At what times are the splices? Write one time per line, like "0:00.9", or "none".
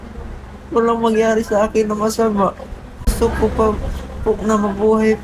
0:03.1